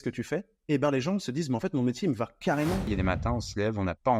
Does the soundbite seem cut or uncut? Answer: cut